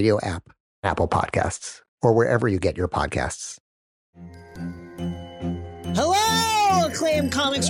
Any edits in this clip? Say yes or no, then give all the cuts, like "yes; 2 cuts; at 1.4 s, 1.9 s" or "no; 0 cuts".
no; 0 cuts